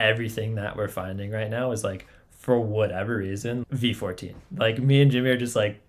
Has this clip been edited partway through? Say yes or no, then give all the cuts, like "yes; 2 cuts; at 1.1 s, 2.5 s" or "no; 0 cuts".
yes; 1 cut; at 3.6 s